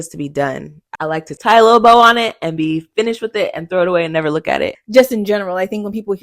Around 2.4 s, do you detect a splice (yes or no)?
no